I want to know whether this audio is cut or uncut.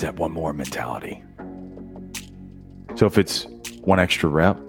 cut